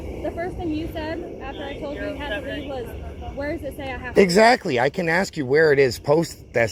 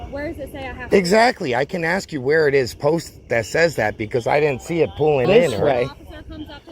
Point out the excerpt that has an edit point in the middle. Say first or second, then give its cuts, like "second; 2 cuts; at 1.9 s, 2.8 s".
second; 1 cut; at 5.3 s